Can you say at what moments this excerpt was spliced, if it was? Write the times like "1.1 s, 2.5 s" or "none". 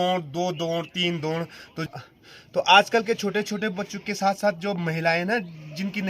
1.9 s